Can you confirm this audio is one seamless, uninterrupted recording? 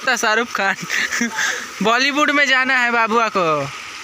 yes; 0 cuts

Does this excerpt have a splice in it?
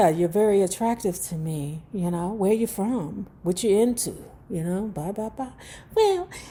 no; 0 cuts

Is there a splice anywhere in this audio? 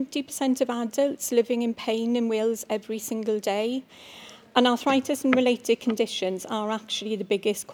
yes; 1 cut; at 4.0 s

